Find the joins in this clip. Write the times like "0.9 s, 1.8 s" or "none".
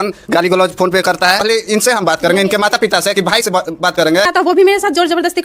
4.3 s